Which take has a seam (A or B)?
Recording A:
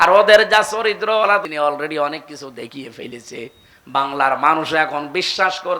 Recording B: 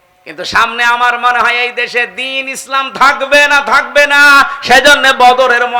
A